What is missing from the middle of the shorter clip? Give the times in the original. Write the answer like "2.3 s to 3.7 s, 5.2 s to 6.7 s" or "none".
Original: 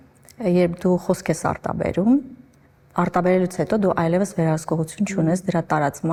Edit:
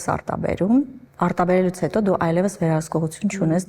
2.4 s to 2.8 s

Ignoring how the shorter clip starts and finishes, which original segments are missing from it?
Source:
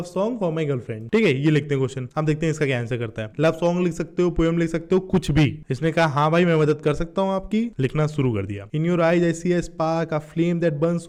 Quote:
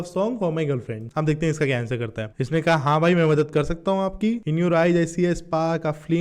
1.0 s to 2.0 s, 3.3 s to 5.6 s, 7.7 s to 8.7 s

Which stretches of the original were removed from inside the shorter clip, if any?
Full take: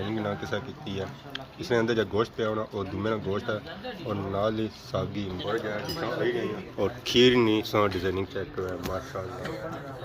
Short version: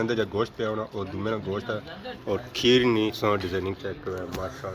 3.9 s to 6.7 s

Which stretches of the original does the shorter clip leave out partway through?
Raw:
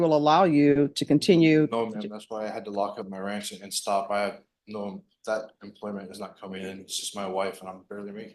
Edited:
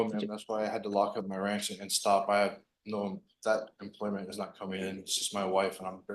none

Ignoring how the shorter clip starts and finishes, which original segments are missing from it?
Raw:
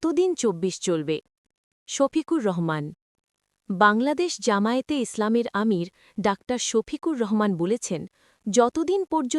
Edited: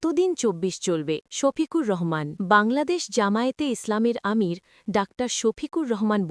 1.3 s to 1.9 s, 2.9 s to 3.6 s

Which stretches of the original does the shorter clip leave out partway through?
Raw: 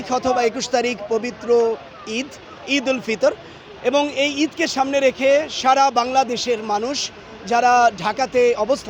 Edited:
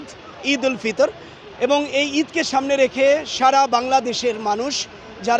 none

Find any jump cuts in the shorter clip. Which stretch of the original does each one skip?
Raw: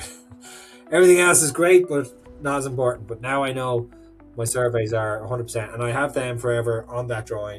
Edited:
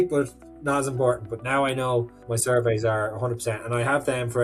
4.0 s to 4.3 s

